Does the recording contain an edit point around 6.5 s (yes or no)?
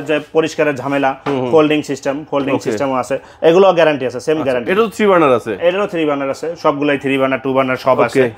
no